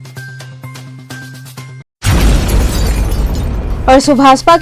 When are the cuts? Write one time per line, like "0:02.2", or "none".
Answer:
0:01.9
0:03.6